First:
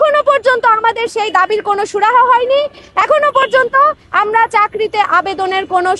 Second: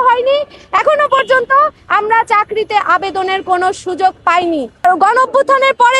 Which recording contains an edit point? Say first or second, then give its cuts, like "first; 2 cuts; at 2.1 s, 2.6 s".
second; 1 cut; at 4.8 s